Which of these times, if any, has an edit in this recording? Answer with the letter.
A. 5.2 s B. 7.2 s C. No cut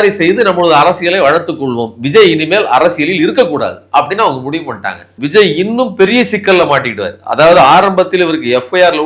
A